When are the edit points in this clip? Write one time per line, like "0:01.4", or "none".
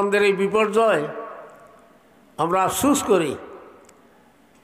none